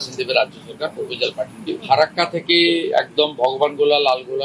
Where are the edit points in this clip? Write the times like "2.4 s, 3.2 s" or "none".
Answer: 1.6 s